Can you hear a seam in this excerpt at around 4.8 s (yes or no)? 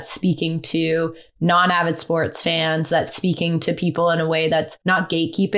yes